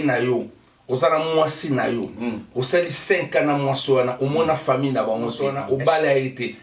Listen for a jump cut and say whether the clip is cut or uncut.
cut